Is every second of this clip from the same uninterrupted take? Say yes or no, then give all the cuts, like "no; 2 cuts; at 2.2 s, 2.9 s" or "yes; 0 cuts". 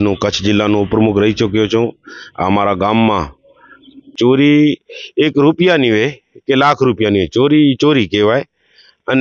no; 1 cut; at 4.1 s